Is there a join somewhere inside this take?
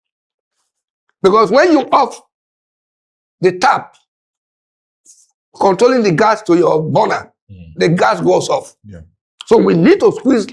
no; 0 cuts

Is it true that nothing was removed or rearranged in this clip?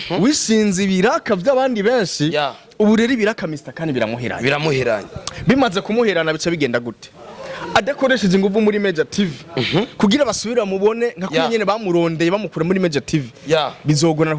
yes; 0 cuts

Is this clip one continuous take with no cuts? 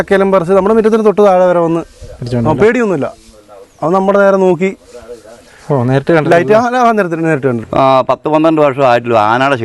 no; 1 cut; at 7.6 s

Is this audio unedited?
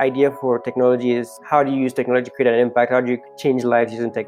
no; 2 cuts; at 1.3 s, 3.3 s

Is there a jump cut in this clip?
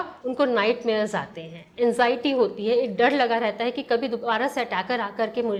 no; 0 cuts

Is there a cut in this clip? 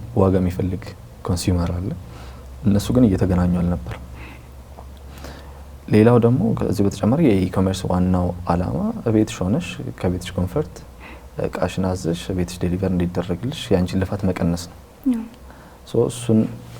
no; 0 cuts

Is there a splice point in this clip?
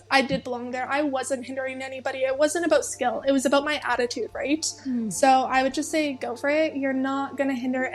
no; 0 cuts

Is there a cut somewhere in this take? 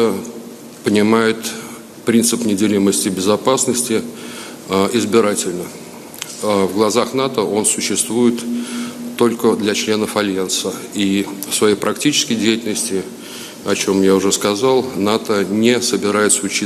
no; 0 cuts

